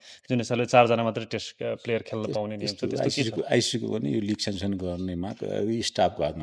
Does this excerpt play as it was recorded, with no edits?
yes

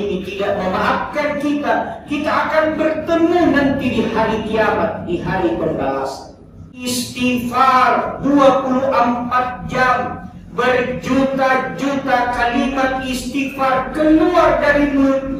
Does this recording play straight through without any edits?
no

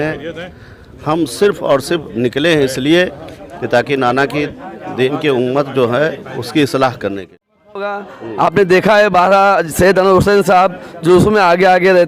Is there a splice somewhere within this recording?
yes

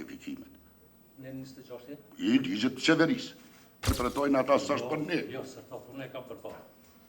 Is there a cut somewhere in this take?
yes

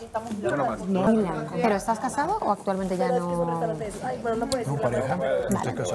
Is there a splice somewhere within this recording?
yes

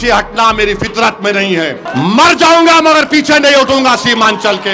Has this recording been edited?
yes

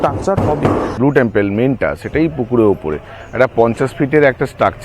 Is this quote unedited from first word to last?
no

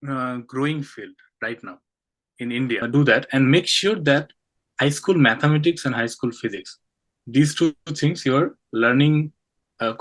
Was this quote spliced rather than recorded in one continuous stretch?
yes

